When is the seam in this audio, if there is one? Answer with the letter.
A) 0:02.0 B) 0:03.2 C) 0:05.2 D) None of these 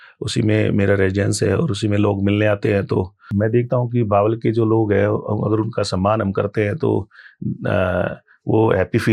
B